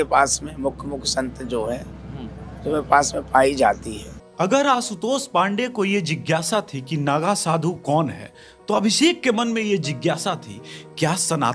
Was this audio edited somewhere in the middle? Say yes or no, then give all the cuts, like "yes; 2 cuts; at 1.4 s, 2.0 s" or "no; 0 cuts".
no; 0 cuts